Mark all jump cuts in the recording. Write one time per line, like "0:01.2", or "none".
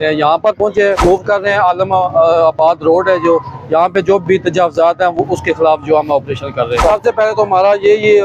0:01.0
0:06.8